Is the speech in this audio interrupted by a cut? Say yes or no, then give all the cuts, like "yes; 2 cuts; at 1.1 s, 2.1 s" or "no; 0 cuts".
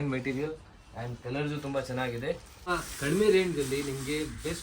yes; 1 cut; at 2.7 s